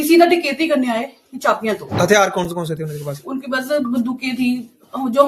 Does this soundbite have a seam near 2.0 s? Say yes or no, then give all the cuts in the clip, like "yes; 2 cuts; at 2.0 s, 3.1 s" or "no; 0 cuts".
yes; 1 cut; at 2.0 s